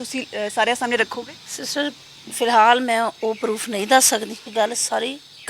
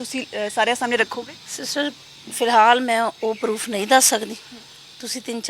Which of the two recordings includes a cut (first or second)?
first